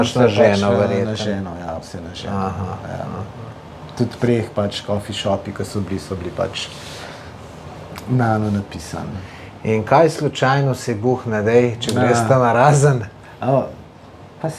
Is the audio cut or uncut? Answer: uncut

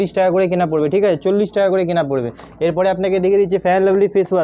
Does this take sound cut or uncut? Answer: uncut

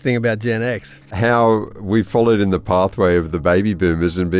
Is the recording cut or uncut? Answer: cut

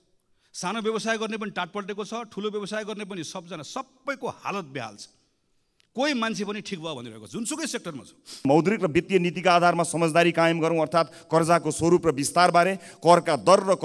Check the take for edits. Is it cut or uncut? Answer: cut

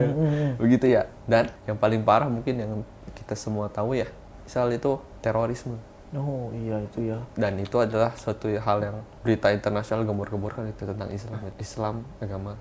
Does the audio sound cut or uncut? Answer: cut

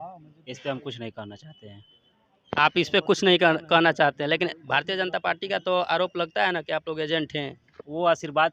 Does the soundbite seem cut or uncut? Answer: uncut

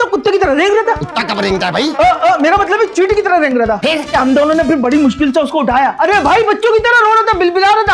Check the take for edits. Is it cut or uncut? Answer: uncut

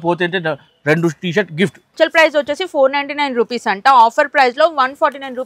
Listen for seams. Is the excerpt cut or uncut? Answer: cut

